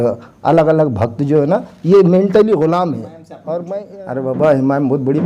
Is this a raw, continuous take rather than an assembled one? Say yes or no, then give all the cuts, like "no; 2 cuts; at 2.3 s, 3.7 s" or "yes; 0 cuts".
no; 1 cut; at 3.8 s